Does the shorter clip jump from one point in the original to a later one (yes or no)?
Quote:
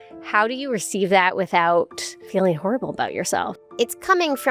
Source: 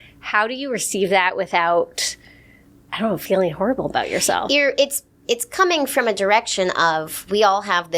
yes